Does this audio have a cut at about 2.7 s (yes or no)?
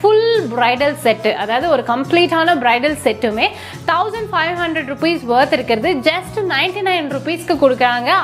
no